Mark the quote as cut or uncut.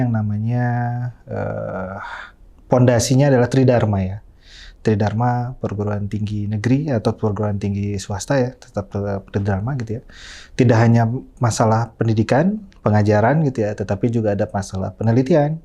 uncut